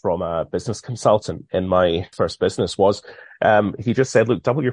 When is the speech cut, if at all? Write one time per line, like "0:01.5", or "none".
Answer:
0:02.1